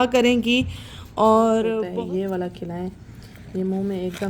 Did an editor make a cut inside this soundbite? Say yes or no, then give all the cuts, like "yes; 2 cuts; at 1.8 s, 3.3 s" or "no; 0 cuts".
yes; 1 cut; at 1.8 s